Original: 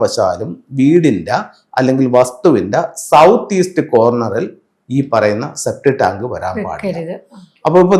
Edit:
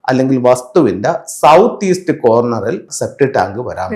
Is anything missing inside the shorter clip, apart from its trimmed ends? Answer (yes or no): yes